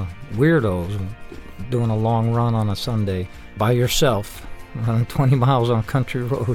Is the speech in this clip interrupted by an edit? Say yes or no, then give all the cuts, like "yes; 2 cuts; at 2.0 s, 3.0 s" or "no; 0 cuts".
yes; 1 cut; at 3.5 s